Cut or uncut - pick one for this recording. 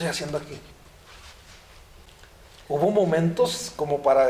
uncut